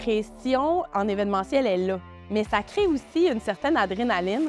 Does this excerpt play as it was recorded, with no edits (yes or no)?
yes